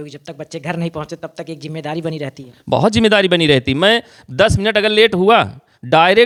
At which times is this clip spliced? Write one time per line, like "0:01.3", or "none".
none